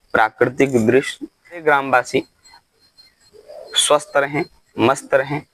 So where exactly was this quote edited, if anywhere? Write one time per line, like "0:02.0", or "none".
0:01.6